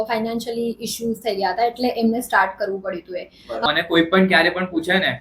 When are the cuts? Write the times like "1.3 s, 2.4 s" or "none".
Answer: 3.6 s